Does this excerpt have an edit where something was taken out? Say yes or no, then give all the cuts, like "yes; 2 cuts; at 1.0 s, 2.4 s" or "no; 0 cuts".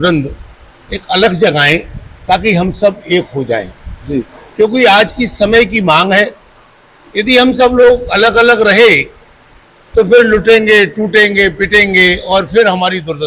no; 0 cuts